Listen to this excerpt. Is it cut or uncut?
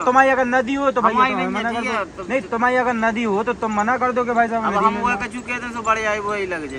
uncut